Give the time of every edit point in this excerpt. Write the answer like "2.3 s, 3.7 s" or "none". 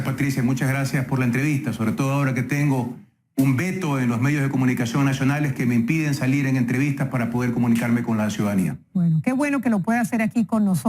6.2 s